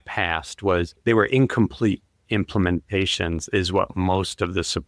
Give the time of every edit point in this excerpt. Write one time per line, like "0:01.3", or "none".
0:00.9